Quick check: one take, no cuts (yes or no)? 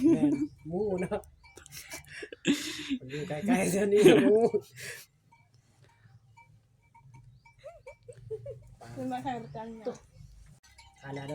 yes